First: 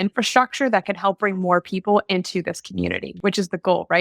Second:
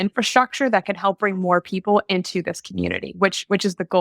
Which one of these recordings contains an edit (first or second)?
first